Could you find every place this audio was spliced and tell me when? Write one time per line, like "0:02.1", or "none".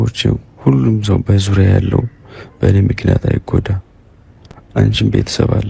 none